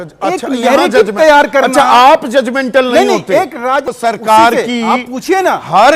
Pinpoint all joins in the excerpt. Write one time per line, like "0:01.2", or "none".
0:03.9